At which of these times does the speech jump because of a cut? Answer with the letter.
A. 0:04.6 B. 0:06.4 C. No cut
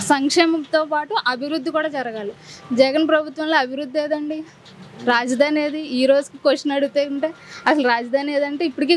C